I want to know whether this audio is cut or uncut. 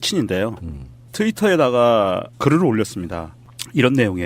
cut